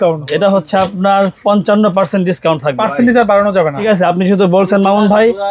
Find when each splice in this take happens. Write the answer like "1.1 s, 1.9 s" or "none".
2.8 s, 3.8 s